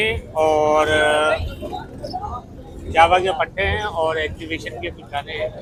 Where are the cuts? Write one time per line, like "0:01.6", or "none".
none